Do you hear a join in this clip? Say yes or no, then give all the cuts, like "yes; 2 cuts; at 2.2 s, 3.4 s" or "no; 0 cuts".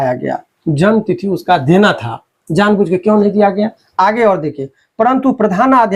no; 0 cuts